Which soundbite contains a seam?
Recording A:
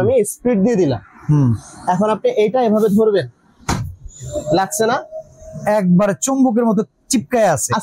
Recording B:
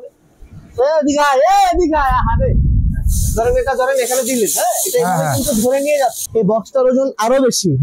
B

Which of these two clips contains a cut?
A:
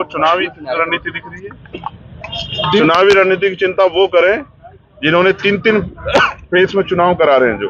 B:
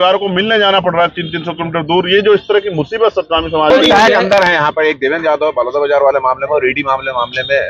B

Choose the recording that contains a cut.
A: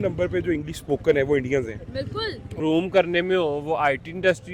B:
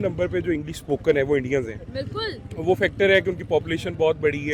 A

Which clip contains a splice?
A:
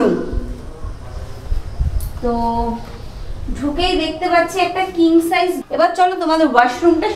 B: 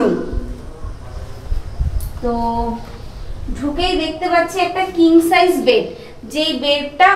A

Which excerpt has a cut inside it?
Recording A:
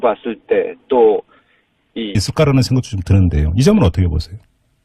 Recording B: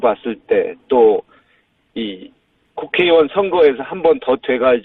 B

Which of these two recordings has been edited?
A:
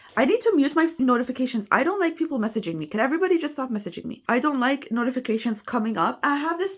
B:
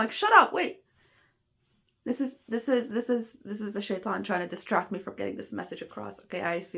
A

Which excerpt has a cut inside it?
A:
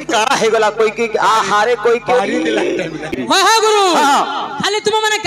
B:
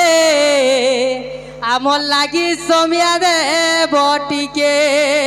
A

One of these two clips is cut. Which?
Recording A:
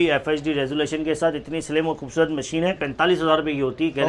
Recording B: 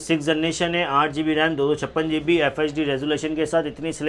A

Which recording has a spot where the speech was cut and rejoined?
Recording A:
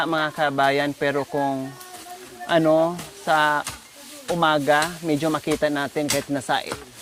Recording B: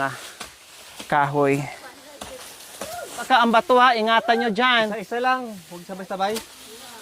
B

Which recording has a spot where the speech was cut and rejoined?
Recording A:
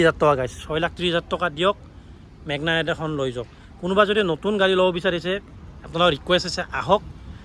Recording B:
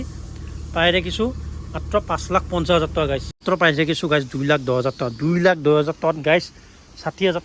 B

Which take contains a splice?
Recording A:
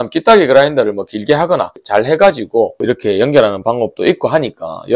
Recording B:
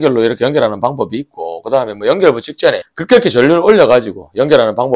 A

